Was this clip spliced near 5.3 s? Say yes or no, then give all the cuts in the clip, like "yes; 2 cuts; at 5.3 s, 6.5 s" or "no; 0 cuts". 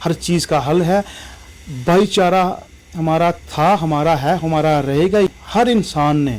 yes; 1 cut; at 5.3 s